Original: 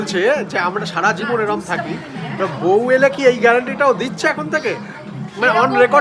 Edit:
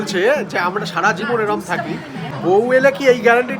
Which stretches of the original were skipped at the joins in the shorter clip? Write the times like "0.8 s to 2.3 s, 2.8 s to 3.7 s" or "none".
2.3 s to 2.5 s